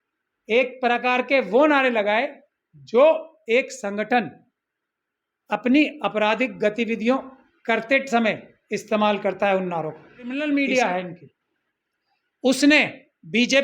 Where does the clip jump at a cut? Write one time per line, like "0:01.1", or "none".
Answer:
0:10.4